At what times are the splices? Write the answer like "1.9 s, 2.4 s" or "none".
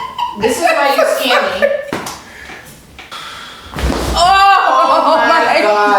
3.1 s